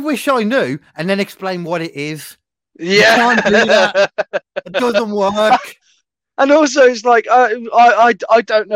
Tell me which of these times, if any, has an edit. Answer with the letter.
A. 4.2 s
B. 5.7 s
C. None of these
C